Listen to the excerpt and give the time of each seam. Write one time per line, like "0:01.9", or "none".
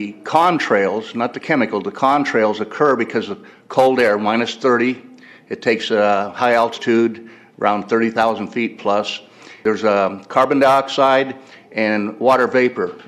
0:01.4